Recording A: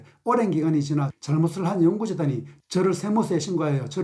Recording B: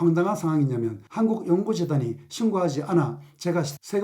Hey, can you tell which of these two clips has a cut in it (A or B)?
B